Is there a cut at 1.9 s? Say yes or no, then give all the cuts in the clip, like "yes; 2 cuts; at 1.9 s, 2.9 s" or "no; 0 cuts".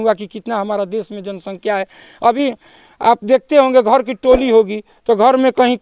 no; 0 cuts